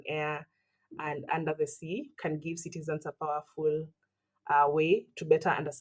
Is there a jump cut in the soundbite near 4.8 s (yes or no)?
no